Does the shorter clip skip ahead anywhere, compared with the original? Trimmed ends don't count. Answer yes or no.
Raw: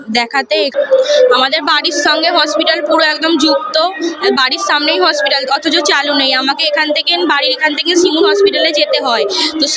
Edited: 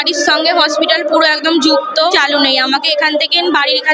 yes